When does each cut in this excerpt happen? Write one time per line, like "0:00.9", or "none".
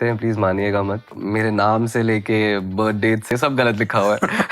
0:01.1
0:03.3